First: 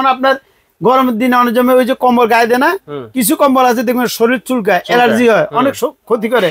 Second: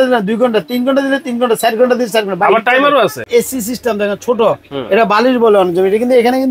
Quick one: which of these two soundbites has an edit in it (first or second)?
second